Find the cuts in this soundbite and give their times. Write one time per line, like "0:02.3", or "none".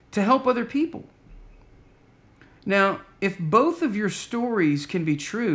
none